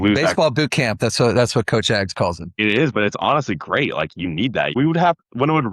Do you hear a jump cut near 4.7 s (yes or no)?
yes